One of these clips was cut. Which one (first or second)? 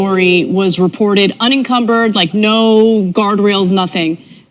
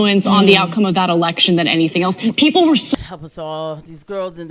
second